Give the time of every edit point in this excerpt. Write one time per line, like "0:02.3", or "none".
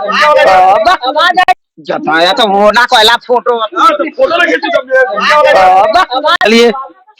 0:01.4
0:06.4

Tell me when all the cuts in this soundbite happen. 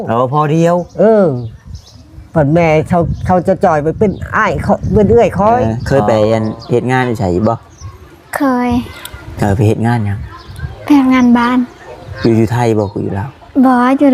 0:05.7

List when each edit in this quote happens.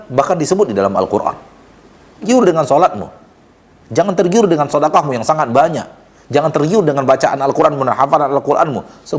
0:02.3

